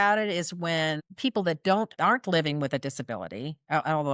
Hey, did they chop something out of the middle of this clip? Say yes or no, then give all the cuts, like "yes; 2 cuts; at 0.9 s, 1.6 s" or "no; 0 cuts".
yes; 2 cuts; at 1.1 s, 2.0 s